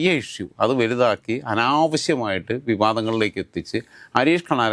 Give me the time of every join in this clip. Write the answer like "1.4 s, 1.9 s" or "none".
none

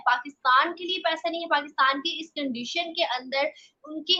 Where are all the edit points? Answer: none

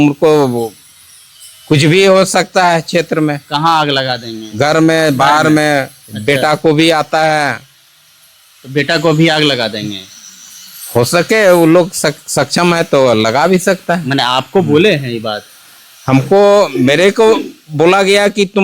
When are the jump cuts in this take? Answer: none

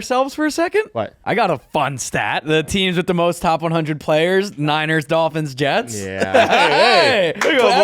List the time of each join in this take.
1.2 s, 2.5 s

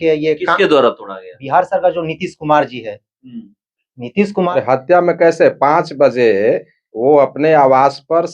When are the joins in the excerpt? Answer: 4.5 s

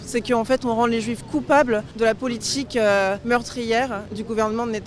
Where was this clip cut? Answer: 1.9 s, 3.2 s

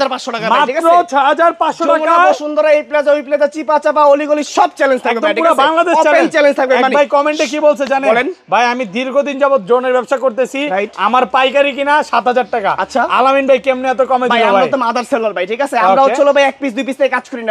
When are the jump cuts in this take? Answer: none

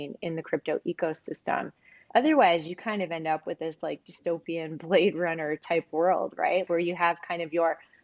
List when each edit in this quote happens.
2.0 s, 6.7 s

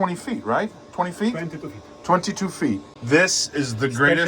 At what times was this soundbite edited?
2.9 s

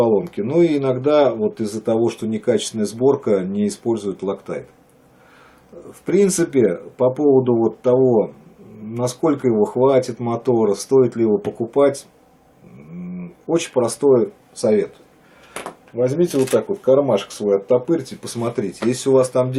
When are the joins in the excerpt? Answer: 6.1 s

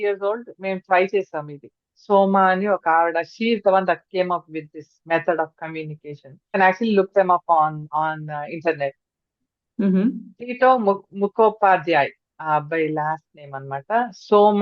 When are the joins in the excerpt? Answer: 6.6 s

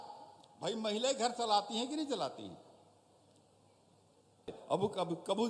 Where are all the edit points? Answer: 4.5 s

